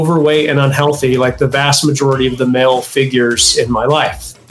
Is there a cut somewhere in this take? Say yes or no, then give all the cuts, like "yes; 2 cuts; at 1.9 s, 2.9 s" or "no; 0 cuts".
no; 0 cuts